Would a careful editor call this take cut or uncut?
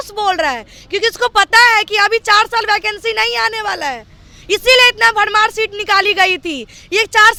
uncut